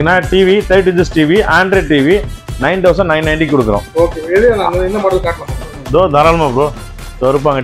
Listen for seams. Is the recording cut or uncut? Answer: uncut